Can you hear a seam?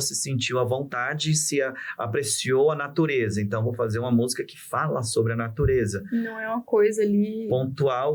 no; 0 cuts

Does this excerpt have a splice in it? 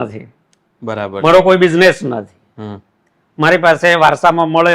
no; 0 cuts

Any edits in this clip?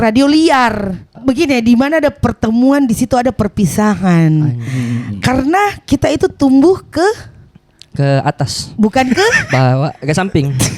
yes; 1 cut; at 1.1 s

